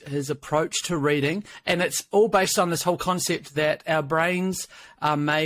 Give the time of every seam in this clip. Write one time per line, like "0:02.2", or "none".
0:01.5